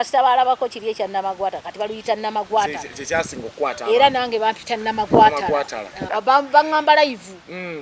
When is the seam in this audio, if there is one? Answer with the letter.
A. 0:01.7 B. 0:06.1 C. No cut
B